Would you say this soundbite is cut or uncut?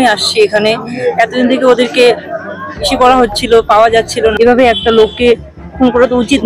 cut